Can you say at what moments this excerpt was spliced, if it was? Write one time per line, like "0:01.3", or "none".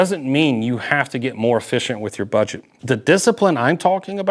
0:02.7